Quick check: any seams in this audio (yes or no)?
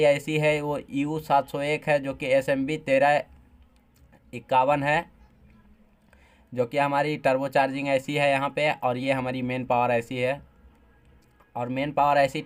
no